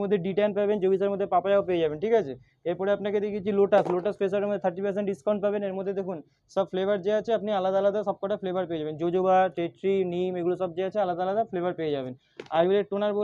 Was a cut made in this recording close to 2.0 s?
no; 0 cuts

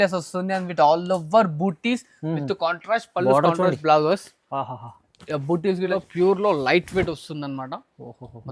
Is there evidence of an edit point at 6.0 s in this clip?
yes; 1 cut; at 6.0 s

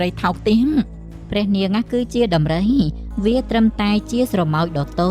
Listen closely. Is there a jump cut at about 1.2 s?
yes; 1 cut; at 1.2 s

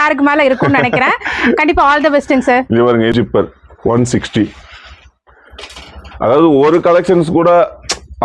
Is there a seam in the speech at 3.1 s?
yes; 1 cut; at 3.1 s

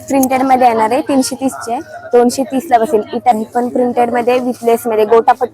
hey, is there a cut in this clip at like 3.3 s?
yes; 1 cut; at 3.3 s

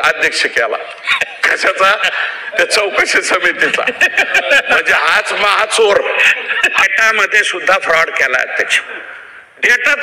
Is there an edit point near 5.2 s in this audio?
no; 1 cut; at 6.8 s

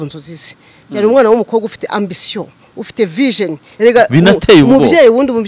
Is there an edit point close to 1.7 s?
no; 1 cut; at 3.6 s

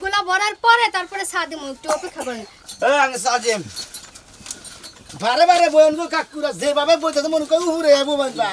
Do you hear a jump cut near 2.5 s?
yes; 1 cut; at 2.5 s

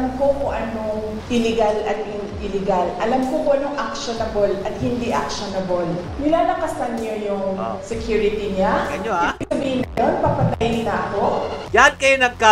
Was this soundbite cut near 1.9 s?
no; 2 cuts; at 6.1 s, 11.6 s

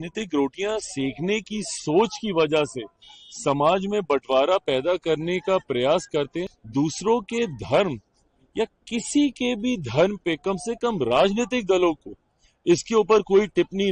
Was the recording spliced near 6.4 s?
yes; 1 cut; at 6.4 s

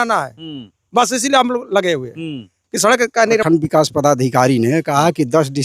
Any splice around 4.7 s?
no; 1 cut; at 3.4 s

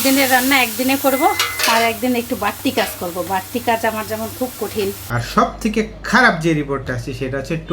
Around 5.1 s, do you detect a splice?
yes; 1 cut; at 5.1 s

